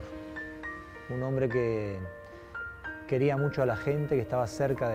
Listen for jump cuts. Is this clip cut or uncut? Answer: uncut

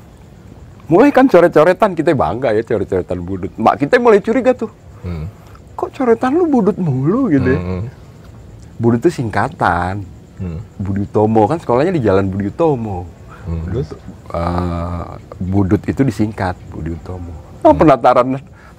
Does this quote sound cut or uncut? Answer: uncut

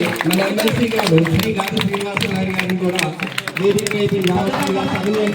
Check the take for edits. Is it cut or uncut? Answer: uncut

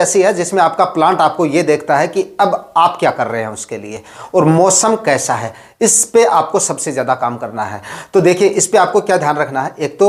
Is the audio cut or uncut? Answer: uncut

